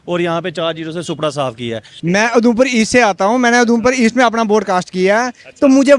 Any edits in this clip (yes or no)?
yes